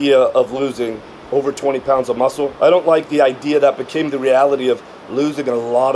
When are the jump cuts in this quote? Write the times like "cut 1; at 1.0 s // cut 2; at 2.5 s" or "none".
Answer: none